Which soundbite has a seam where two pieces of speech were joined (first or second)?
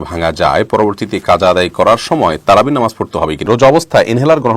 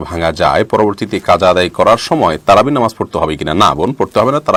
first